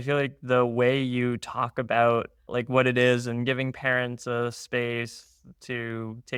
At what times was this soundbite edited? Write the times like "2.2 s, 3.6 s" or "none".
none